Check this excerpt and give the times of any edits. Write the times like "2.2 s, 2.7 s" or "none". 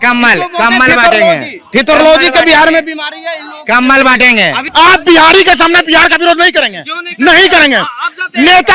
4.6 s

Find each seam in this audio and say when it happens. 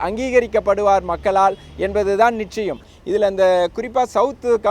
2.8 s

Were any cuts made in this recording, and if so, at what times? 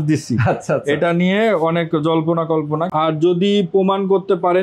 3.0 s

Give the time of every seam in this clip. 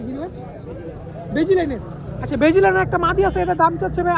none

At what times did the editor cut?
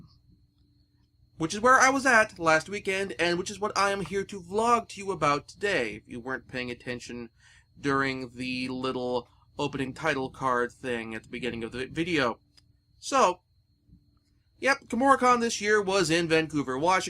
12.9 s

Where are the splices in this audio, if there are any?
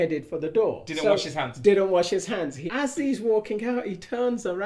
2.6 s

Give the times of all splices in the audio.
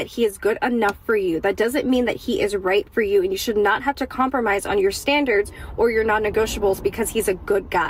1.6 s, 3.4 s, 5.6 s

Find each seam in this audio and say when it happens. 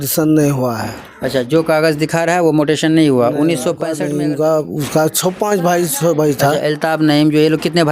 3.9 s

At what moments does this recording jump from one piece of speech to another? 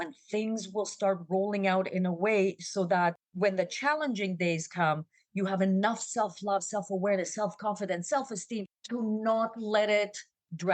8.7 s

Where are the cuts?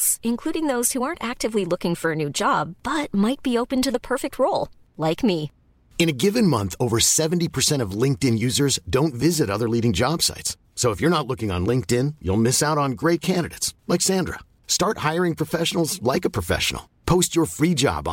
none

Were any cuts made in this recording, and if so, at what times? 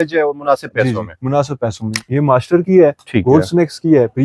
2.1 s

